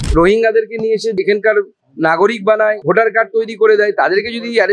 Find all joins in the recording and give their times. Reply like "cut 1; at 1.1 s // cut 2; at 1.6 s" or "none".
cut 1; at 1.2 s // cut 2; at 2.8 s